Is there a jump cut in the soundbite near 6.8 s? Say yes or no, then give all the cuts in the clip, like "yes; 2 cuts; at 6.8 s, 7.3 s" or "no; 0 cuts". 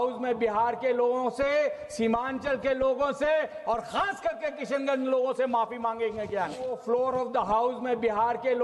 yes; 1 cut; at 6.8 s